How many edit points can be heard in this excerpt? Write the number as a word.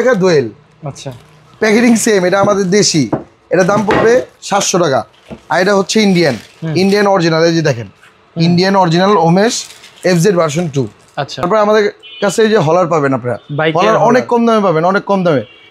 one